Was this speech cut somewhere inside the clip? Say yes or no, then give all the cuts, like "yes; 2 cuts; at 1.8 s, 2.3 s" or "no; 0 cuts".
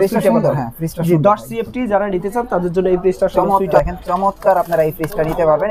yes; 1 cut; at 3.7 s